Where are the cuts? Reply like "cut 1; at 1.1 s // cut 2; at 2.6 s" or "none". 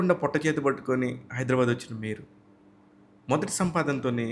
none